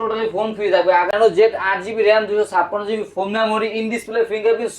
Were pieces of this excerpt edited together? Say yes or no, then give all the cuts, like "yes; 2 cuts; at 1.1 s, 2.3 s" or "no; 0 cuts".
yes; 1 cut; at 1.2 s